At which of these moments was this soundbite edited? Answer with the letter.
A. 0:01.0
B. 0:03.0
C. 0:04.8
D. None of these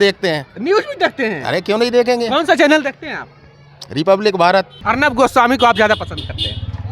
C